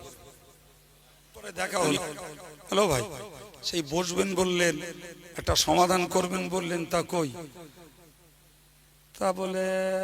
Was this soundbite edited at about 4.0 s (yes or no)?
no